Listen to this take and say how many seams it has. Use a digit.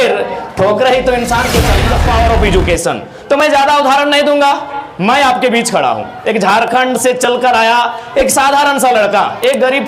1